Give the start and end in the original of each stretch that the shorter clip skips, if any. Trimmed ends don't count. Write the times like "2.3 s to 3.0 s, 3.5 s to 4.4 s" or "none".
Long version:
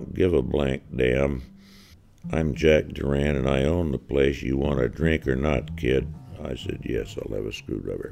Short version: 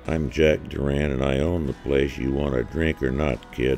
none